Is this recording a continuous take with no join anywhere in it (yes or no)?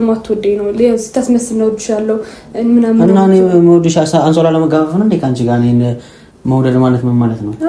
yes